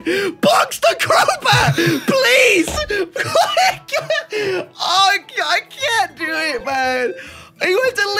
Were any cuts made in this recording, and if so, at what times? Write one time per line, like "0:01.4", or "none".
none

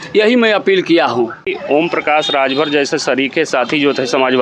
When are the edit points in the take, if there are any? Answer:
0:01.5

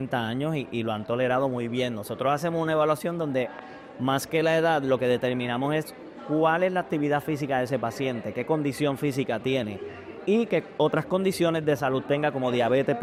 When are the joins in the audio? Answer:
none

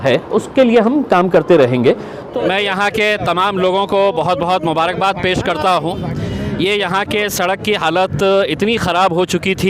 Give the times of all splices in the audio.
0:02.3

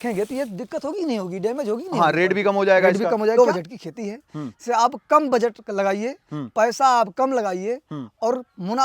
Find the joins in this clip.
0:03.4

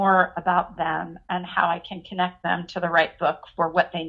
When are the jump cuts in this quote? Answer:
none

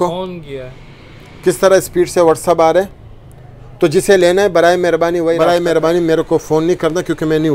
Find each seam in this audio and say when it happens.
0:05.4

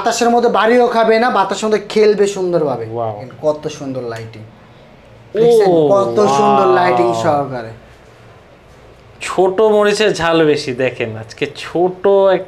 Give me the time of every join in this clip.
0:03.3

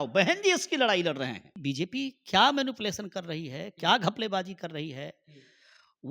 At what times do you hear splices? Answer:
0:01.5

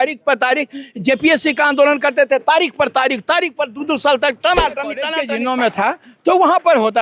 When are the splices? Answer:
0:05.2

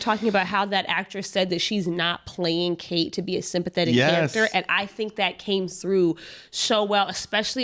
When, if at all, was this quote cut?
none

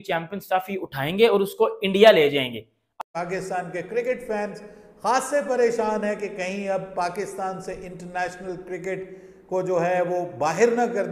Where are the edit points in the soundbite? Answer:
0:03.0

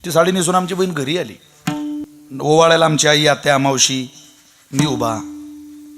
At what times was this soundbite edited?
0:02.0

